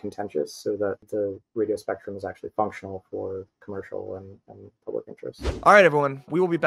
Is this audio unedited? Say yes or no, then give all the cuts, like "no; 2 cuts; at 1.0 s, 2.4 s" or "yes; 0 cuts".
no; 2 cuts; at 1.0 s, 5.6 s